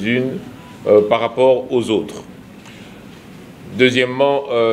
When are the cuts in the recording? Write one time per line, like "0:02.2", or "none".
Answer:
none